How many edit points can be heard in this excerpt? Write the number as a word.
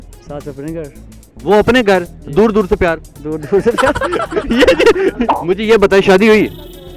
one